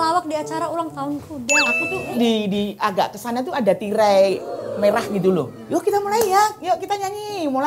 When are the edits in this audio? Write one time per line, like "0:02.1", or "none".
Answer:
0:01.8
0:05.6